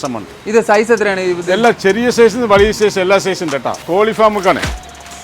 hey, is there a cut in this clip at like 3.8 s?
yes; 1 cut; at 3.8 s

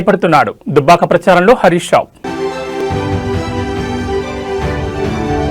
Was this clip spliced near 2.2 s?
no; 0 cuts

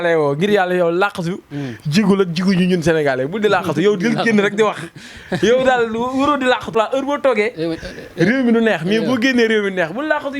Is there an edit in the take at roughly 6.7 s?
yes; 1 cut; at 6.7 s

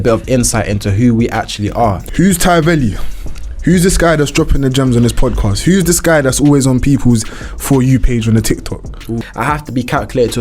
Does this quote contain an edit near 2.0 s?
yes; 2 cuts; at 2.0 s, 9.3 s

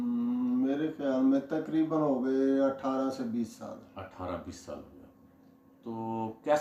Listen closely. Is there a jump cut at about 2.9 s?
no; 0 cuts

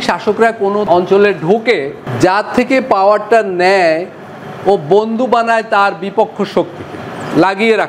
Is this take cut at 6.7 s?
no; 2 cuts; at 0.8 s, 2.0 s

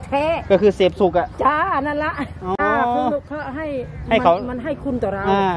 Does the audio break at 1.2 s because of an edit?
no; 1 cut; at 2.6 s

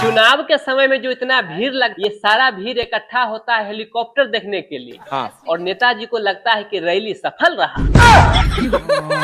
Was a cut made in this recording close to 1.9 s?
yes; 1 cut; at 1.9 s

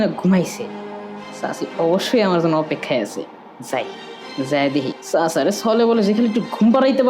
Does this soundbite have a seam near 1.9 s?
no; 1 cut; at 5.0 s

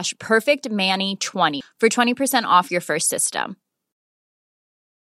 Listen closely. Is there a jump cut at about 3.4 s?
no; 1 cut; at 1.6 s

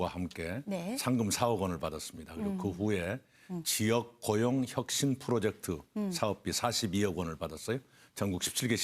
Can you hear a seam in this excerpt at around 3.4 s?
yes; 1 cut; at 3.4 s

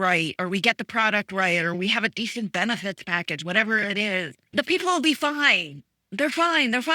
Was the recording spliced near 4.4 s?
yes; 2 cuts; at 1.8 s, 4.4 s

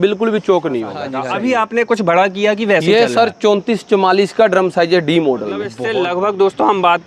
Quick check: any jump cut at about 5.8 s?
yes; 2 cuts; at 1.1 s, 5.8 s

